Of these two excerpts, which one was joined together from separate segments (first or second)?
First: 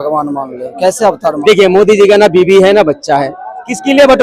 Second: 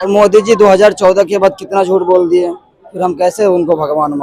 first